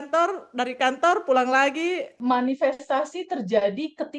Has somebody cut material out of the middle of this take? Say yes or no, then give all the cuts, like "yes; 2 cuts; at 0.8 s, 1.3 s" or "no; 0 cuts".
yes; 1 cut; at 2.1 s